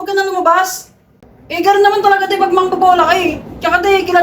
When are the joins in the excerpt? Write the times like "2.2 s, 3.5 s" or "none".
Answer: 1.0 s